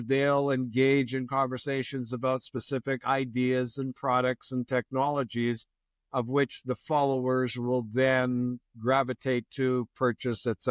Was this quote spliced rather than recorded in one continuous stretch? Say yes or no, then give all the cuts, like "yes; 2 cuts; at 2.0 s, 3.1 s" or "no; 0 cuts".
no; 0 cuts